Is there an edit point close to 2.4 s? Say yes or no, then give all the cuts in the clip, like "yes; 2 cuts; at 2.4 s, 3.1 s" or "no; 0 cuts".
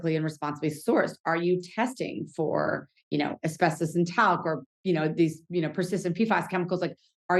no; 0 cuts